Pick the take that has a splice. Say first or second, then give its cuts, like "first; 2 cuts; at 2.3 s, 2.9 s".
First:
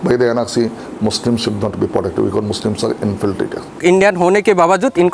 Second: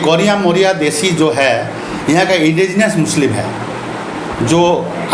first; 1 cut; at 3.8 s